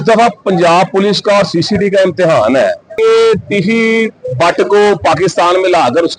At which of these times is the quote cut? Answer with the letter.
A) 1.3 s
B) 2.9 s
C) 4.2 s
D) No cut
B